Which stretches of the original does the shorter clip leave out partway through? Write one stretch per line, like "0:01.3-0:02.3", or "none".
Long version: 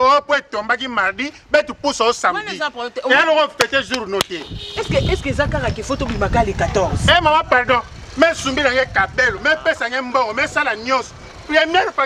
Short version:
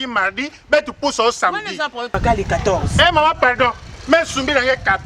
0:02.9-0:06.2